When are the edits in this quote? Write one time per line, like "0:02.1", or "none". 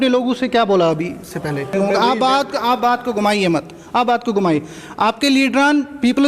0:01.7